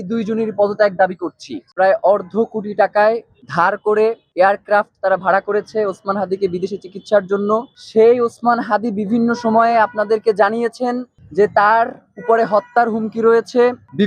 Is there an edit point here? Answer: yes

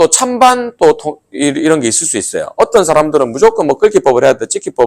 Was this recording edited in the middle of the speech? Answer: no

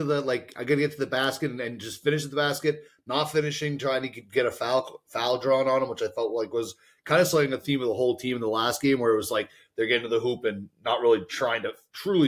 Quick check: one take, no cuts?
yes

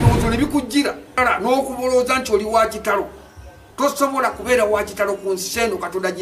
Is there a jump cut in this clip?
yes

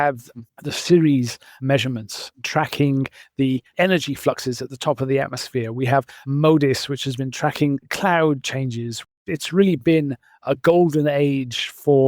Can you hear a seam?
yes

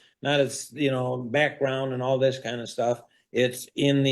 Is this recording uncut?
yes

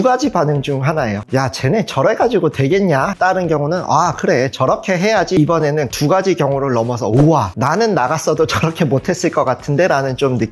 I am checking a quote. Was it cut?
yes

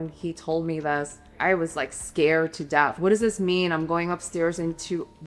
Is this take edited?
yes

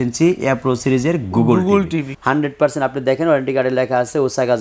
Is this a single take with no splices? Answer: no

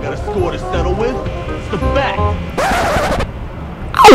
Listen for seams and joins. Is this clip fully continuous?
yes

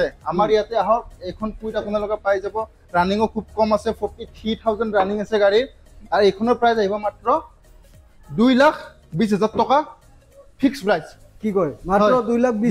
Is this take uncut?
yes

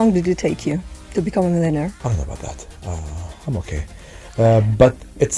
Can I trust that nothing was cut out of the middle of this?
no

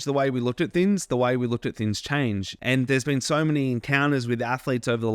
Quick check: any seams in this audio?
yes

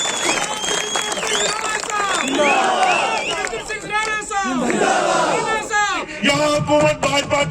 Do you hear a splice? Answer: yes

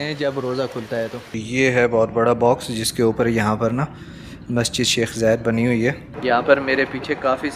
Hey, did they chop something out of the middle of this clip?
yes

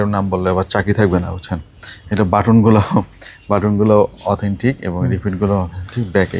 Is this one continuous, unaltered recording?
yes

